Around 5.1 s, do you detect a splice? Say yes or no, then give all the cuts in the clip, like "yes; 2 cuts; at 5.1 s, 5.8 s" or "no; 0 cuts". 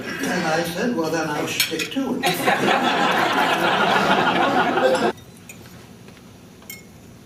no; 0 cuts